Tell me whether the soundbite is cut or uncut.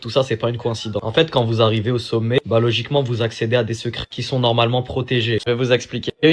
cut